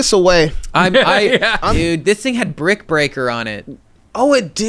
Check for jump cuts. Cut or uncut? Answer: cut